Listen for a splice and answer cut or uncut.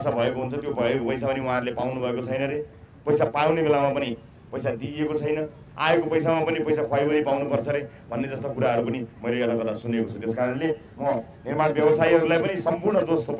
uncut